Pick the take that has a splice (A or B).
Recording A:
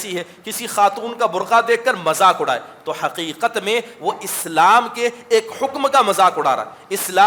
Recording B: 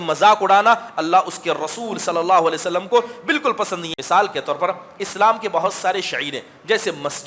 B